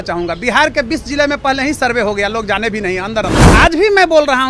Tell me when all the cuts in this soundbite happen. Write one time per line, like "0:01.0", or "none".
0:03.5